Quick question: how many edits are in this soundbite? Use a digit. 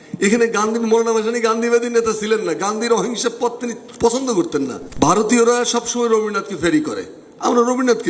1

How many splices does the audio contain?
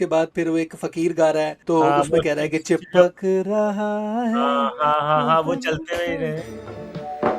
1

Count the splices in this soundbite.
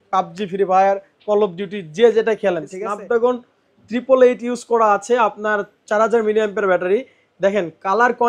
1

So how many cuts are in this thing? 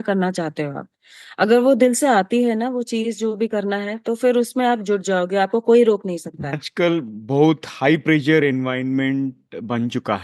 1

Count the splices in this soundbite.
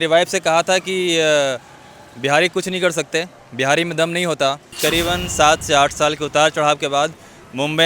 1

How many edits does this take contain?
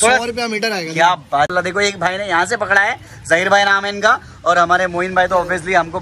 1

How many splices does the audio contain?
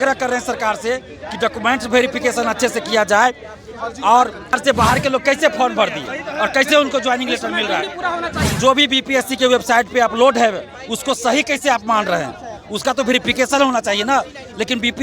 2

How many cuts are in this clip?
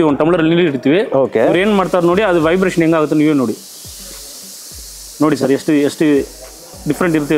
0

